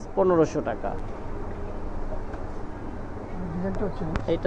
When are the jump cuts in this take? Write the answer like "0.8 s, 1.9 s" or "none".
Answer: 1.0 s